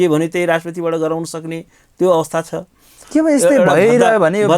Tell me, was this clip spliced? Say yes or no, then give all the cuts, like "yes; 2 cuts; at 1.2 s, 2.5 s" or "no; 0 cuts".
yes; 1 cut; at 2.9 s